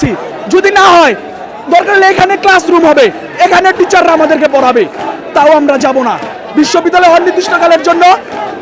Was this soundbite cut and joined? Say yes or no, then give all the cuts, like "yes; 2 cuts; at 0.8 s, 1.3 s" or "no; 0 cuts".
no; 0 cuts